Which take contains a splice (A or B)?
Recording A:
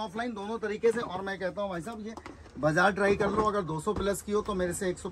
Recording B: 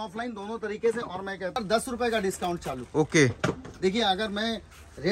B